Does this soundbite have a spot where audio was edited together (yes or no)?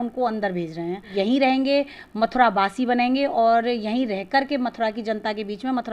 yes